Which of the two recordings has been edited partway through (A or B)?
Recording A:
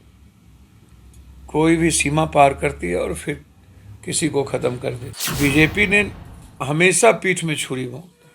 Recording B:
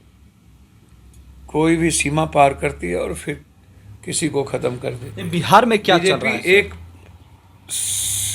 A